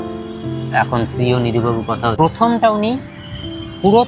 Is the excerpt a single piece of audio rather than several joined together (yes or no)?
no